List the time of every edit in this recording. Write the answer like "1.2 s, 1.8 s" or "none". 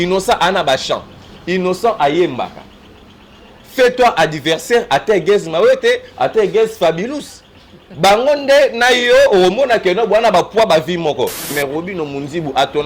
11.4 s